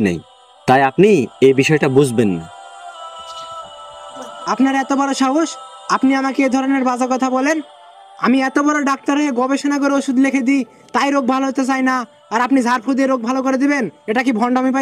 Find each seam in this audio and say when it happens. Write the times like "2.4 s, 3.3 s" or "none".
none